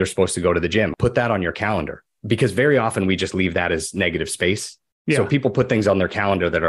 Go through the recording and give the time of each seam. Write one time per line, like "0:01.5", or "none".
0:00.9
0:02.1

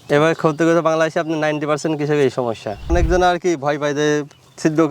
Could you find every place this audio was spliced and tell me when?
0:02.8

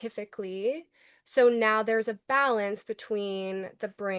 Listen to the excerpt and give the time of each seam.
none

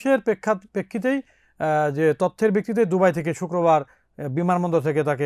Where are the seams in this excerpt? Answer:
none

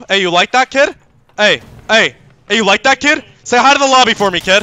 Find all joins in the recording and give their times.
none

